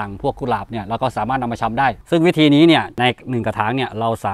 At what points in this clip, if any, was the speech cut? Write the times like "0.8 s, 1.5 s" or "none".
2.0 s, 2.9 s

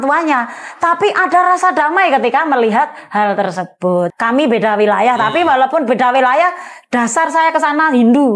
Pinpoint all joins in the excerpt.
4.1 s

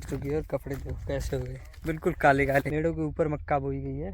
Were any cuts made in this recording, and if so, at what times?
2.7 s

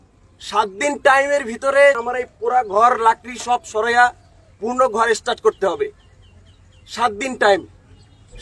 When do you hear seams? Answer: 2.0 s

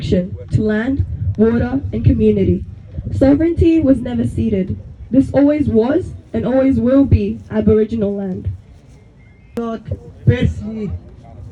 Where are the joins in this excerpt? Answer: 9.6 s

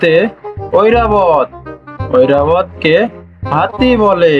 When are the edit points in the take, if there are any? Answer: none

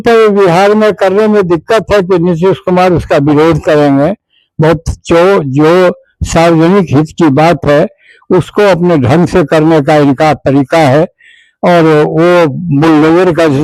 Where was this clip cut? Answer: none

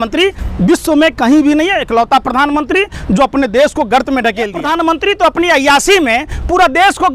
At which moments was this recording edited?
4.6 s

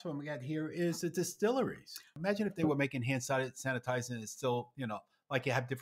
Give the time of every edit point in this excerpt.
2.1 s

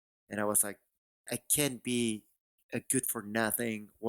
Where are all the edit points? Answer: 1.3 s

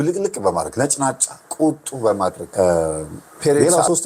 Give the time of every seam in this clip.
2.4 s

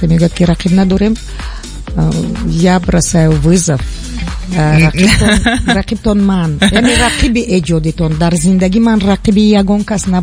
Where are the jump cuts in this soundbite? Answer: none

